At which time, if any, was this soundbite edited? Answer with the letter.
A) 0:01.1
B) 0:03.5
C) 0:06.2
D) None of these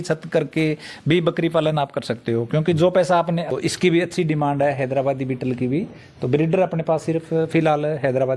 B